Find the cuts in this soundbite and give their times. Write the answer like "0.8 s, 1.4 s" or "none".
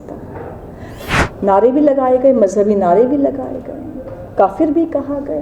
0.9 s

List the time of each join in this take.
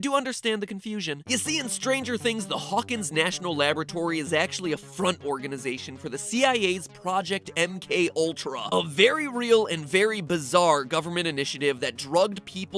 4.5 s

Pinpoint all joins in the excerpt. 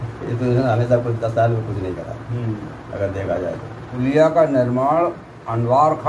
3.8 s

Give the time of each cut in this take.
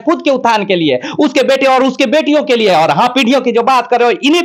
none

